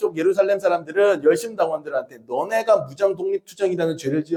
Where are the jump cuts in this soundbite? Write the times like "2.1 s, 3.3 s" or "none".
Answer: none